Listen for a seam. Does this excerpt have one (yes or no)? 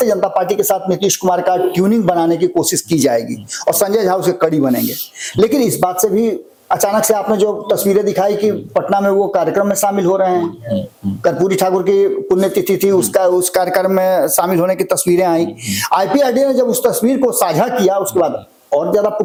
no